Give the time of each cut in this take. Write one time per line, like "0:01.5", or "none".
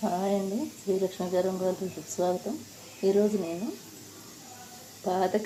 none